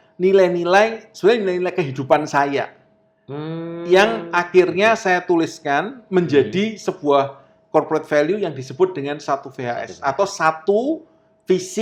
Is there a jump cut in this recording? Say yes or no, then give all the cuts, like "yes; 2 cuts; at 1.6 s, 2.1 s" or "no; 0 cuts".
no; 0 cuts